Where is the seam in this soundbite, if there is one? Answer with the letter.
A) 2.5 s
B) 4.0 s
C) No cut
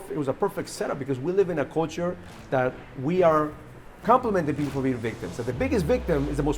B